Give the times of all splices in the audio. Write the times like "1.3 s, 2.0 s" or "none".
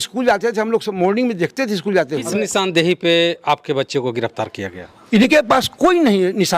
2.4 s

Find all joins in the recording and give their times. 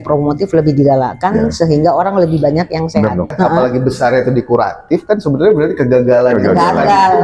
3.3 s

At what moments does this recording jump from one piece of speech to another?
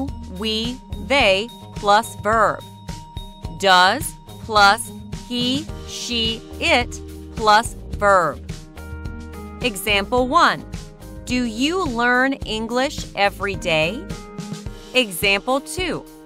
8.7 s

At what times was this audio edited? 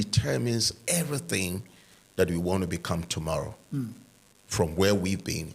none

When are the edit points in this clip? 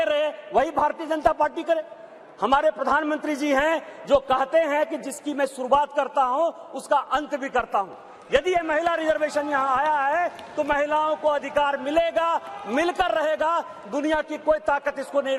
none

